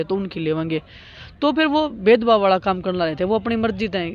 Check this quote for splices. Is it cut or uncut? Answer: uncut